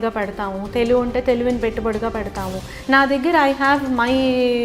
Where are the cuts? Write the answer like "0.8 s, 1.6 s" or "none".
2.7 s